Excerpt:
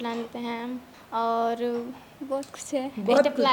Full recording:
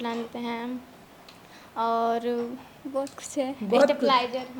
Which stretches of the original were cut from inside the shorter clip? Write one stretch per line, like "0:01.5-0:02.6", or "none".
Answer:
0:00.9-0:01.6